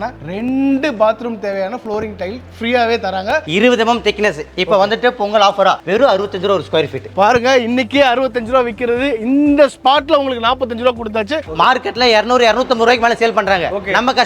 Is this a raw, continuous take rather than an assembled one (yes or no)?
no